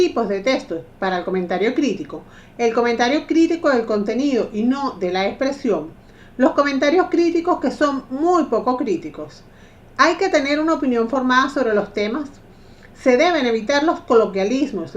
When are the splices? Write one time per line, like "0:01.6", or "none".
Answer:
0:12.2